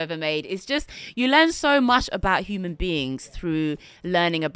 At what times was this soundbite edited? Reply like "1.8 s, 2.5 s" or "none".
none